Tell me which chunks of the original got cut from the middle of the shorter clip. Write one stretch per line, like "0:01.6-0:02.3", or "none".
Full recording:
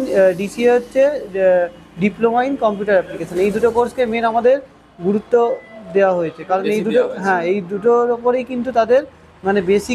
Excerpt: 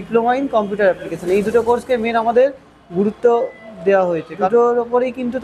0:06.5-0:07.8

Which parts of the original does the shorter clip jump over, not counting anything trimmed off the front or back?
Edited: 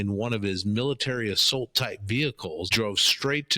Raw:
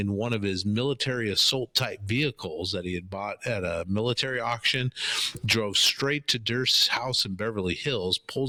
0:02.7-0:05.5

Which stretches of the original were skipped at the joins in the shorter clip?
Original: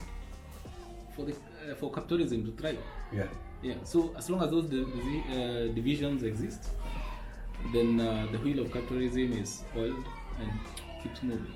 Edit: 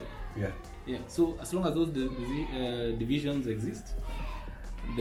none

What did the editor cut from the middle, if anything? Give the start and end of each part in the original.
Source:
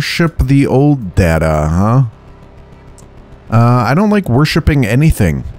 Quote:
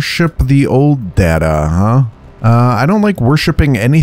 0:02.2-0:03.3

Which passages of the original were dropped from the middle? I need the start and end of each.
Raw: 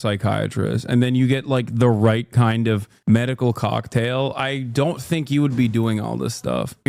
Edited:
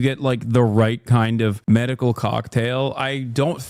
0:02.8-0:03.0

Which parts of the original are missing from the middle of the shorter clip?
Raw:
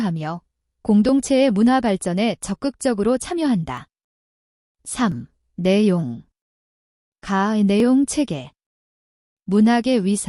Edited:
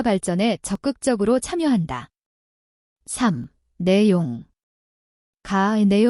none

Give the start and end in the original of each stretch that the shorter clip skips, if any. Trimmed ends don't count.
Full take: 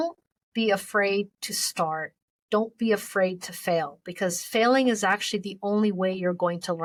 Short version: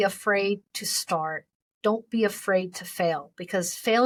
none

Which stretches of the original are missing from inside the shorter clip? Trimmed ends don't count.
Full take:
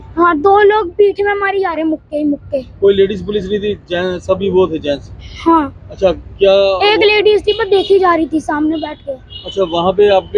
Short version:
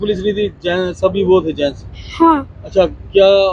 none

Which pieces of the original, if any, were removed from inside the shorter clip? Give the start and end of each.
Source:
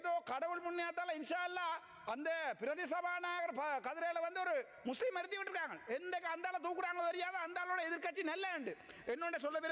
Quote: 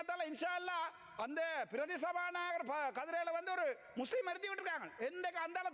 none

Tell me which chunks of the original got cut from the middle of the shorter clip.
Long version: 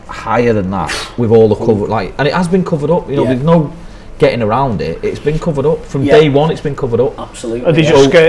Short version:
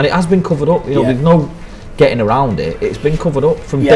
none

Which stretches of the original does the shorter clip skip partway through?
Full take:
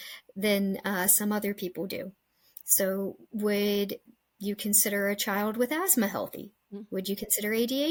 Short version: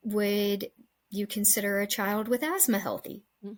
none

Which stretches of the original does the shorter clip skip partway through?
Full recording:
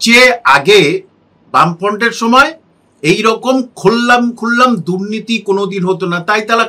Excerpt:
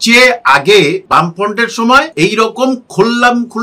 0:01.0-0:01.5
0:02.5-0:03.0

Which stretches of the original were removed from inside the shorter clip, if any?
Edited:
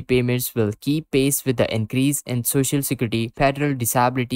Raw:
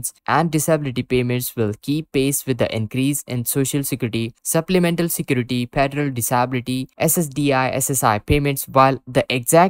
0:04.3-0:05.7

